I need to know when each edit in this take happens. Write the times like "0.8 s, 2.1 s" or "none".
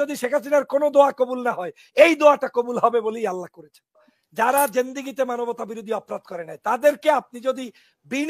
4.1 s